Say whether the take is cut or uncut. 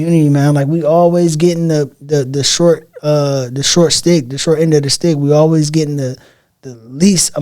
uncut